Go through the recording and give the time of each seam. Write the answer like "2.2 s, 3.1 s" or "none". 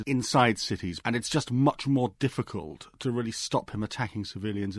0.9 s

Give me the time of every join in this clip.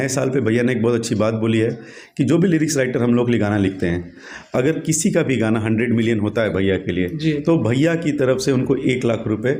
none

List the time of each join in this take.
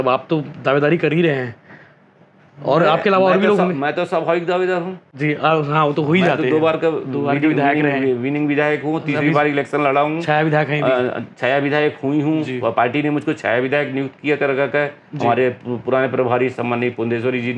none

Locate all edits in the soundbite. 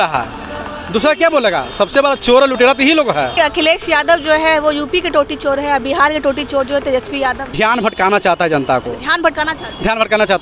3.3 s, 7.4 s

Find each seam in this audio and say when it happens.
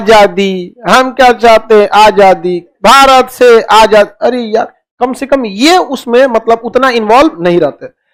none

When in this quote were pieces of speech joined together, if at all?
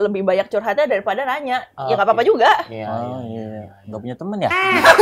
none

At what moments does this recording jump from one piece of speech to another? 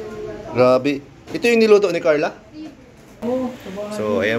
3.2 s

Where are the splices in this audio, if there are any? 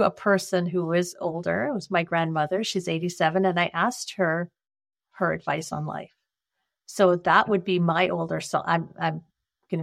none

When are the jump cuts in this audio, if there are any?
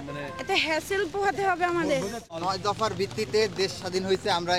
2.3 s

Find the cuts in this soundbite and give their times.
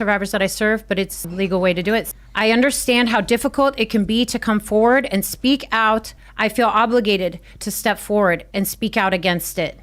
1.2 s, 2.1 s, 6.2 s

